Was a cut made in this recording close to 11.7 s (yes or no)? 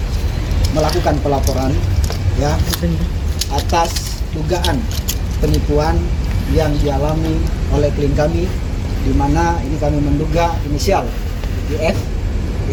no